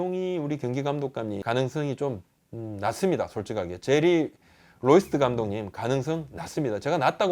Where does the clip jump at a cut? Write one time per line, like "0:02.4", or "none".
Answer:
0:01.4

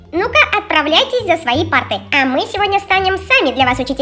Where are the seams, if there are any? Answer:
none

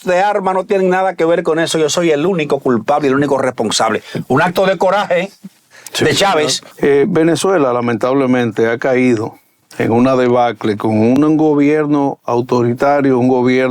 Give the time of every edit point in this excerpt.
0:06.6

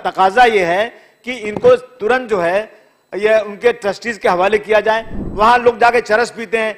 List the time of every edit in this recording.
0:05.2

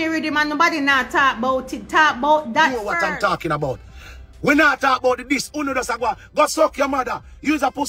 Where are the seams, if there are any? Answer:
0:02.9

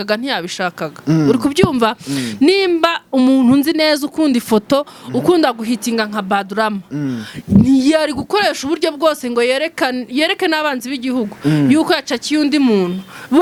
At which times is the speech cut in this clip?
none

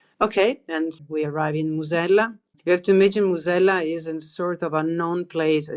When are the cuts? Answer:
0:01.0
0:02.5

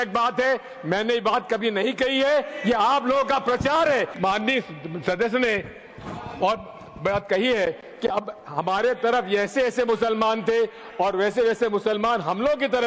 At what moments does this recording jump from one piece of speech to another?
0:04.1

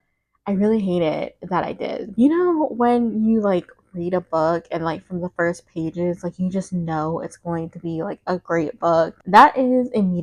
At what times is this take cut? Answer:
0:02.0
0:09.2

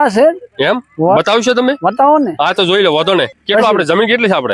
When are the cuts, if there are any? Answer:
0:03.3

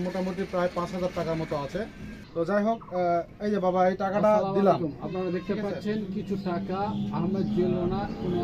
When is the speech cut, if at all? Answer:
none

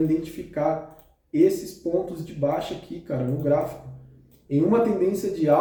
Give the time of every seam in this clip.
none

